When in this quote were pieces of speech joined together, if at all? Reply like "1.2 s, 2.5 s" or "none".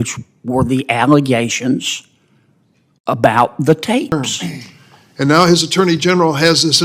4.1 s